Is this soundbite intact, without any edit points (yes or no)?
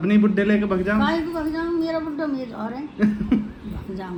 yes